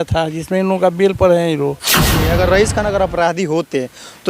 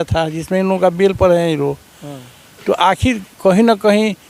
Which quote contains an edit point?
first; 1 cut; at 2.2 s

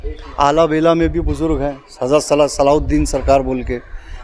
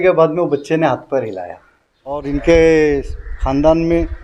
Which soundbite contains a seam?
second; 1 cut; at 2.2 s

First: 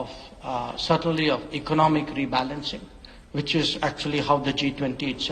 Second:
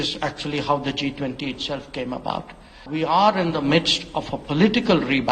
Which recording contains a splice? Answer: second; 1 cut; at 2.8 s

